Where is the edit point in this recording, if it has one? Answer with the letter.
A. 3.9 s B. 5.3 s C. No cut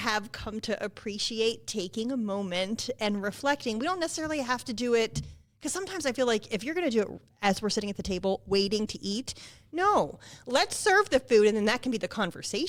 C